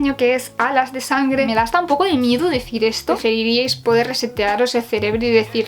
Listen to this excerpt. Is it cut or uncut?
cut